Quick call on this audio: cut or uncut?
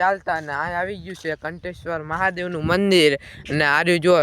uncut